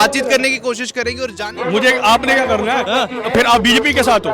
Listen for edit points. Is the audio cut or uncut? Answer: cut